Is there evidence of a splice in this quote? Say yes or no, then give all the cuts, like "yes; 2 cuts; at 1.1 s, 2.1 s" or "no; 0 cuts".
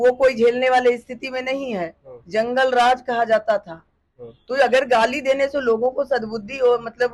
no; 0 cuts